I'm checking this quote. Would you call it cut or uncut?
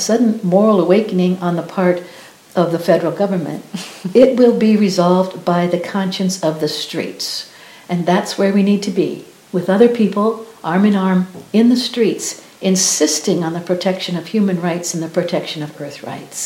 uncut